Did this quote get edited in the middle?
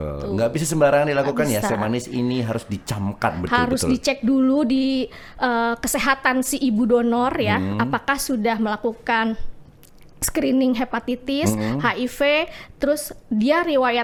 no; 0 cuts

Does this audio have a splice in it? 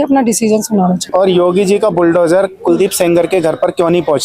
yes; 1 cut; at 1.0 s

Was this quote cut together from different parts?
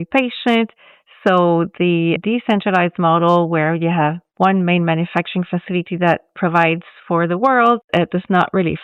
no; 0 cuts

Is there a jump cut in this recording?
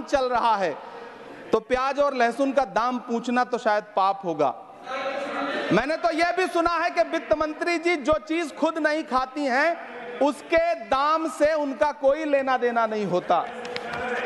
no; 0 cuts

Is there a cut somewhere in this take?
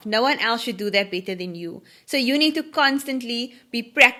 no; 0 cuts

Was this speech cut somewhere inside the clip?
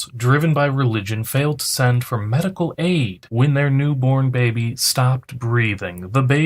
no; 0 cuts

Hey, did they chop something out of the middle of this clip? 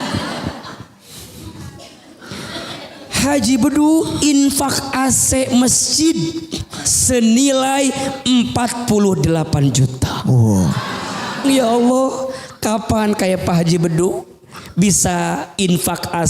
yes; 1 cut; at 11.4 s

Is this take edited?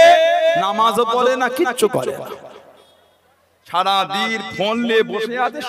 no; 0 cuts

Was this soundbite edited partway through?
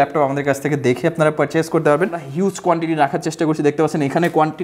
yes; 1 cut; at 2.2 s

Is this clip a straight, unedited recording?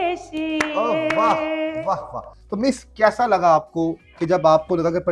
yes; 0 cuts

